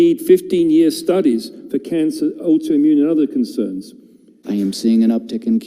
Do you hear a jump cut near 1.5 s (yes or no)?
no